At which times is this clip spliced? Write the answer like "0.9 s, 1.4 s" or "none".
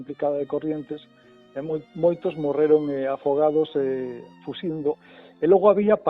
5.0 s